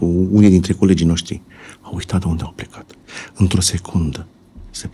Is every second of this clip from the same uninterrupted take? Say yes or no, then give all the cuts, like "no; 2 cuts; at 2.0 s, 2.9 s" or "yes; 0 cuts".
yes; 0 cuts